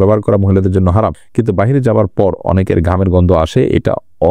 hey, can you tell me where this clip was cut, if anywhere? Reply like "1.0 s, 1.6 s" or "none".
1.2 s

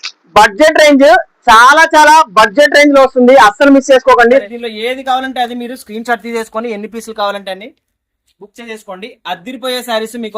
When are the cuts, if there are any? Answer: 4.4 s

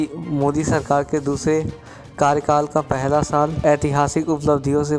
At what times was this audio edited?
3.6 s

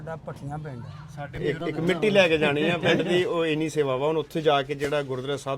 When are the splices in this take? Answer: 1.3 s

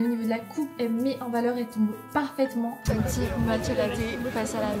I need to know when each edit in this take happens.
2.8 s

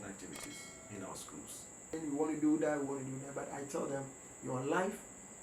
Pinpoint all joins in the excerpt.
2.0 s

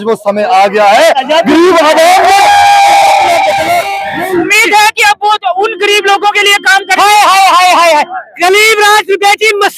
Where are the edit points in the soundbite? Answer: 4.5 s

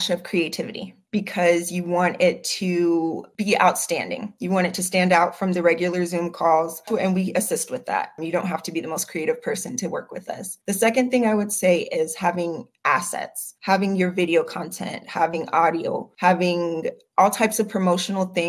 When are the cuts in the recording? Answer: 6.9 s

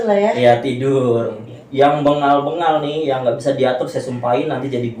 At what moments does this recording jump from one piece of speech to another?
1.5 s

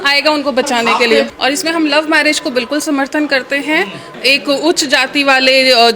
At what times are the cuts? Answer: 1.3 s, 4.1 s

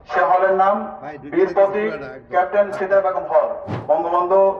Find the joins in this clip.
3.7 s

